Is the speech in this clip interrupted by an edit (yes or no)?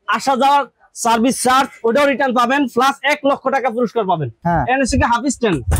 yes